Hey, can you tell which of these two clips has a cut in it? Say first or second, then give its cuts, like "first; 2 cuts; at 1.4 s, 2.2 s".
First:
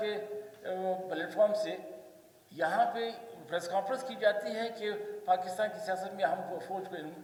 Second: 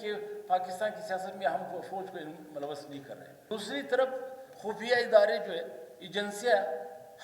second; 1 cut; at 3.4 s